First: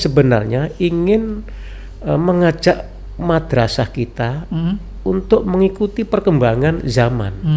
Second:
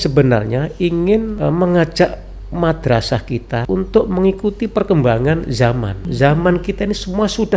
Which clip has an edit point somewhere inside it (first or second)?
second